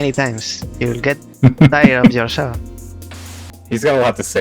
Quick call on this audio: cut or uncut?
cut